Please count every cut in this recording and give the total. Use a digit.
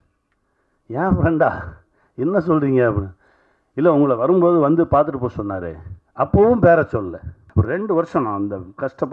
1